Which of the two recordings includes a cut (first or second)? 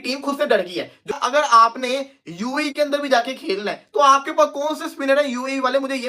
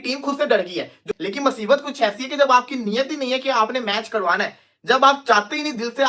second